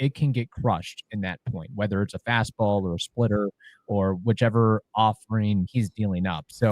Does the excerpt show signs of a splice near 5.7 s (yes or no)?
yes